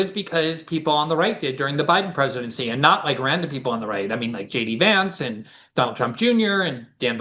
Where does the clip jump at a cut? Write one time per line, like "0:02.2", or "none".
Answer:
none